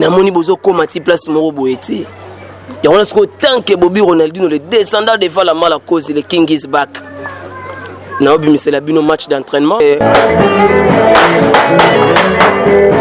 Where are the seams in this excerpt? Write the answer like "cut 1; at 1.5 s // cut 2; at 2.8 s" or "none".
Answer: cut 1; at 10.0 s